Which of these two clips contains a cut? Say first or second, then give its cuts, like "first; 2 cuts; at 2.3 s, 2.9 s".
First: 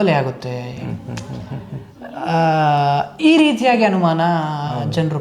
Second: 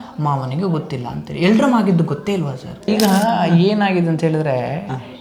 second; 1 cut; at 2.8 s